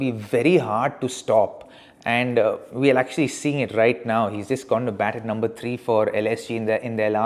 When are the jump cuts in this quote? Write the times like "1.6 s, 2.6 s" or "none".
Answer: none